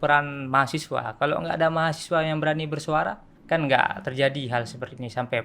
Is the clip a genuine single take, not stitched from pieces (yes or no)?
no